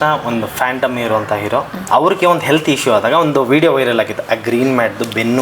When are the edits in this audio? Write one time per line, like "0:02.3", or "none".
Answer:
0:01.8